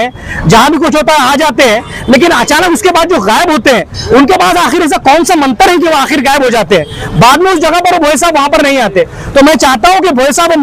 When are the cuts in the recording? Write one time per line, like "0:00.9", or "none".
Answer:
none